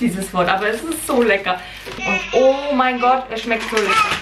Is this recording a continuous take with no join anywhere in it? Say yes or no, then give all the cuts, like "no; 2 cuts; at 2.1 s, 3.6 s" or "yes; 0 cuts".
no; 1 cut; at 2.0 s